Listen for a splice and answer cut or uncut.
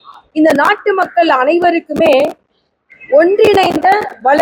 uncut